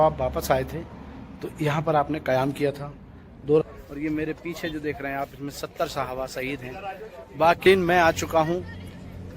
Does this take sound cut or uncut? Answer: cut